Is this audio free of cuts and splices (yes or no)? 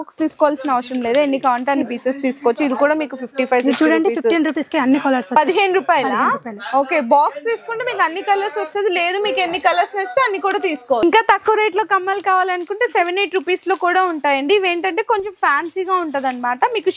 yes